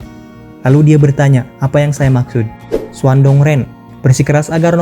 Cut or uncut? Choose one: cut